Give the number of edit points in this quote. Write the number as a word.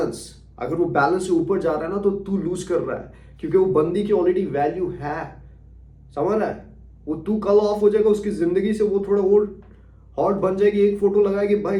zero